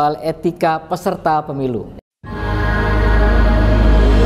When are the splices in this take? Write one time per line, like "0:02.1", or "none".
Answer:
0:02.0

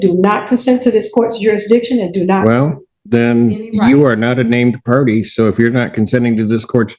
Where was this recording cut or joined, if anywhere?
none

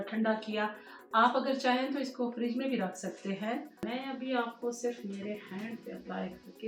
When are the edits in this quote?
0:03.9

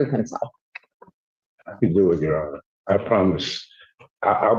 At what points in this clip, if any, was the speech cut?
none

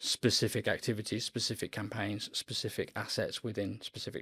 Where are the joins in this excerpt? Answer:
none

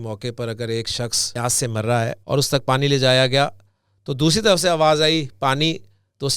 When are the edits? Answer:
0:01.2
0:02.2

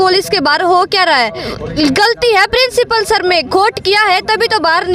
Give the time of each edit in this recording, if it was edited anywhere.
0:01.6

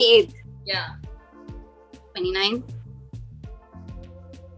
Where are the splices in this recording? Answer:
0:00.9
0:02.1

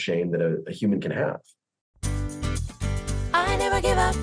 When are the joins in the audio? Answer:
0:01.9

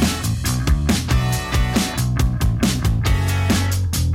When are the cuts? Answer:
0:02.2

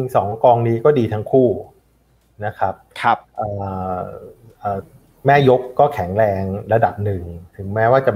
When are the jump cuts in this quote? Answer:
none

